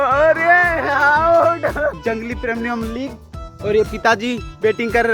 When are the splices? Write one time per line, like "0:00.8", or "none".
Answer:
0:02.0